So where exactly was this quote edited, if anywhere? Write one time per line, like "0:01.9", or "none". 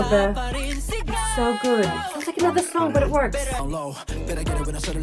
0:03.6